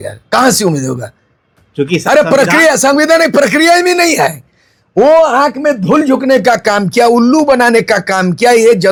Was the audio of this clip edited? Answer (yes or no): no